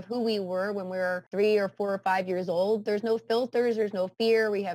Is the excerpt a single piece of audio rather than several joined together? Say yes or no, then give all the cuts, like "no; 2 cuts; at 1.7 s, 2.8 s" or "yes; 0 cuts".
no; 1 cut; at 1.2 s